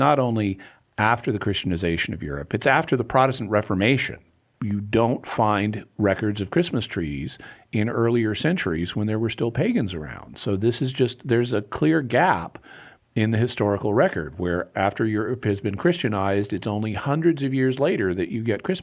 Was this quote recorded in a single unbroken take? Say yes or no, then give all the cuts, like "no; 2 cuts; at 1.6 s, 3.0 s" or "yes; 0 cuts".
no; 2 cuts; at 4.3 s, 14.7 s